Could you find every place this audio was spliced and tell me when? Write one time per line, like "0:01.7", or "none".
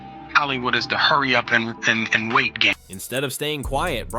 none